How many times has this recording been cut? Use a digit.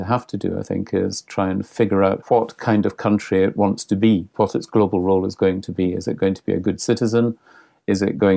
1